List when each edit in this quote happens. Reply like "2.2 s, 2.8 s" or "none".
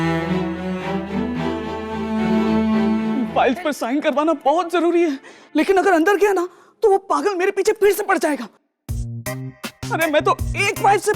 3.2 s